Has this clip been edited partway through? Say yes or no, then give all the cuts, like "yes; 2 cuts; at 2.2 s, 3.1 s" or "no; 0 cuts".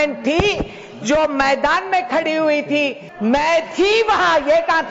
yes; 1 cut; at 3.0 s